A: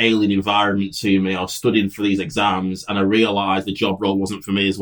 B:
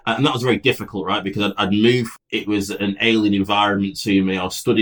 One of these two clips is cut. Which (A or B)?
B